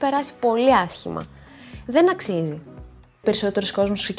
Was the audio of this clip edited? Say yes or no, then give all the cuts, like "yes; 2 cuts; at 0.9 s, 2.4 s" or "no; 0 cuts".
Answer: yes; 1 cut; at 3.2 s